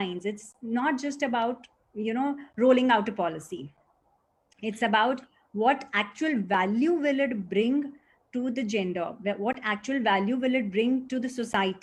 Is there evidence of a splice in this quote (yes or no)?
no